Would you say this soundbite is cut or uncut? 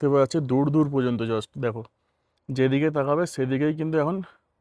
uncut